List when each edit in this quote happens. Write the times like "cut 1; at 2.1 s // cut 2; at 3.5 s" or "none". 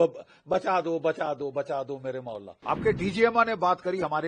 cut 1; at 2.5 s